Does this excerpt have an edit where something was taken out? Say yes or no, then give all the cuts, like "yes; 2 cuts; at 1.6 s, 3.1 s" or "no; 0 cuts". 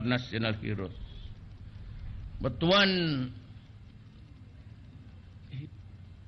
yes; 1 cut; at 1.5 s